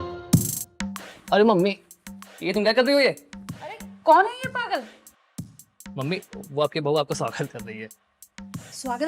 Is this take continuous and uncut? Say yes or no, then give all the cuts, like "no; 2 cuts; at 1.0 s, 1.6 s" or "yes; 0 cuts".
yes; 0 cuts